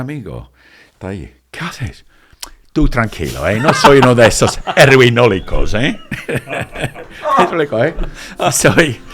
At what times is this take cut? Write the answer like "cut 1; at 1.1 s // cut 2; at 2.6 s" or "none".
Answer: none